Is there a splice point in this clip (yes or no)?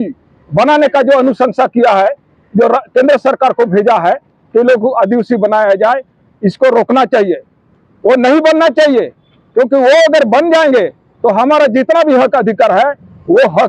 no